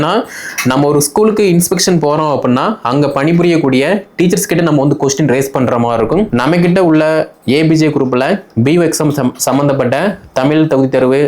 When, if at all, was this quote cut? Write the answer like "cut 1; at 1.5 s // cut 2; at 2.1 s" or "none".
cut 1; at 6.3 s